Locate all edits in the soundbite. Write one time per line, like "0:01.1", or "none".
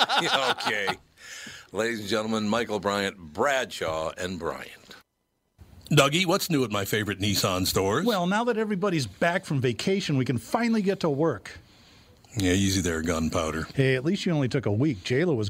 0:05.8

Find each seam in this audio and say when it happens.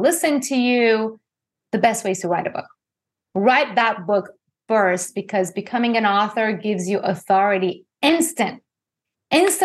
none

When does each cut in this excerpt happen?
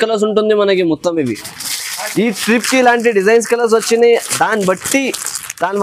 none

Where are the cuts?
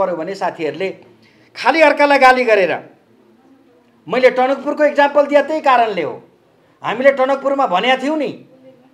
none

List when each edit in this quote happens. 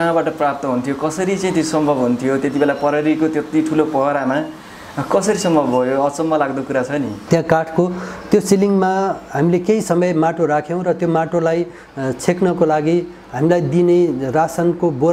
0:07.2

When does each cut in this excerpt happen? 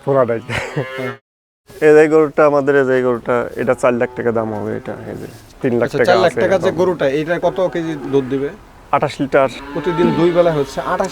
0:01.1
0:07.4
0:09.7

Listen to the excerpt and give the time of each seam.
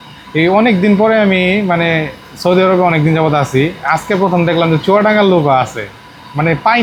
none

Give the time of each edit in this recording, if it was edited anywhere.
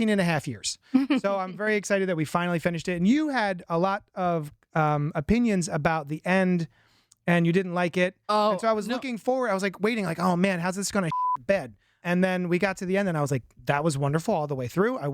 0:12.0

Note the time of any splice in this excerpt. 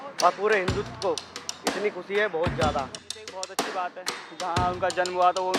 0:03.5

